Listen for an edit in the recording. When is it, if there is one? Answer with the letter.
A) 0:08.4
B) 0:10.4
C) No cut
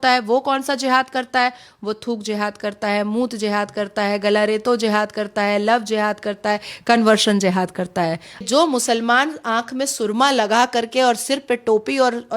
A